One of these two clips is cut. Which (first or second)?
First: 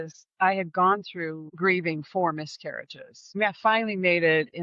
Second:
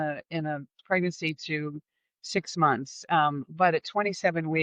first